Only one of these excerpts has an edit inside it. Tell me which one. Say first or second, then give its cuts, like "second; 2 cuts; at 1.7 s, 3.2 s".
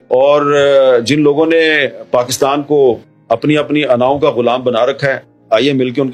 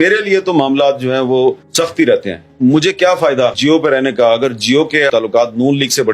second; 3 cuts; at 1.7 s, 3.6 s, 5.1 s